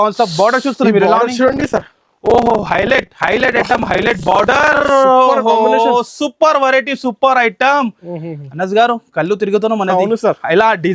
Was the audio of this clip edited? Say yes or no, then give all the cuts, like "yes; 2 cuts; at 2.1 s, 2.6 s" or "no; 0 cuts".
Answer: no; 0 cuts